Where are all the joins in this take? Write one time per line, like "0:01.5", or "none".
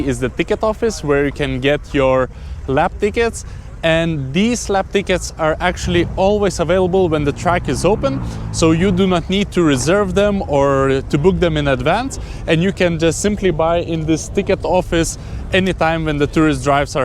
none

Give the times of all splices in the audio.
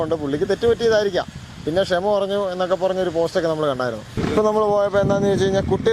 0:04.1

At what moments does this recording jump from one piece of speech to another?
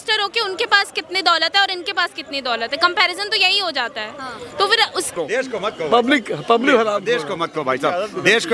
none

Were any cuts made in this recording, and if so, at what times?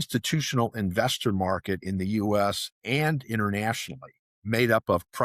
none

